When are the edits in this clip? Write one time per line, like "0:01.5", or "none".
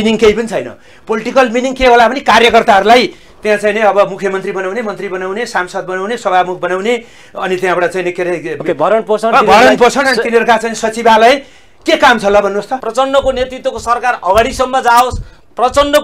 0:12.7